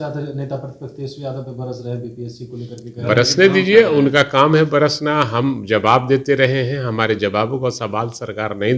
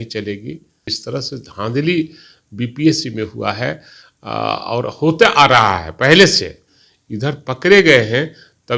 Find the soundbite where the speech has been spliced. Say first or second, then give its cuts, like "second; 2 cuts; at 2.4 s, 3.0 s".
second; 1 cut; at 0.9 s